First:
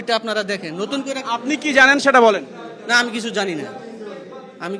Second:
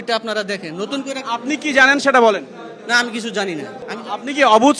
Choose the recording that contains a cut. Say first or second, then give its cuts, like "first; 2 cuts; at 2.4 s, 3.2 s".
second; 1 cut; at 3.8 s